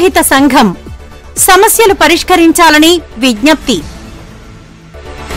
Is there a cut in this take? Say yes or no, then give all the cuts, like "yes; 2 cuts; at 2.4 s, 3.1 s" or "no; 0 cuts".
yes; 1 cut; at 3.8 s